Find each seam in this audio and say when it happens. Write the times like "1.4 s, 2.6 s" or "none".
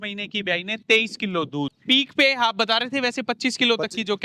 1.7 s